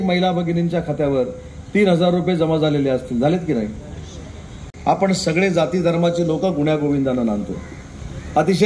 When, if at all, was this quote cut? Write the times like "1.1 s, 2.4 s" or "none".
none